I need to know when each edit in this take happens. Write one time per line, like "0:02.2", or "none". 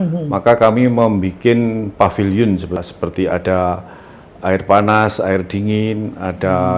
0:02.8